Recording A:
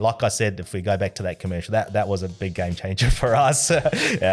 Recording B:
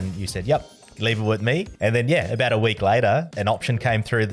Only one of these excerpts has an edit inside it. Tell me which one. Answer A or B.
B